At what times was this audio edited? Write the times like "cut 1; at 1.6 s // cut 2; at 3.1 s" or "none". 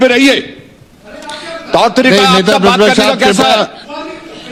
none